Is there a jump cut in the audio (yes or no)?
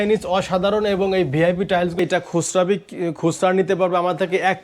yes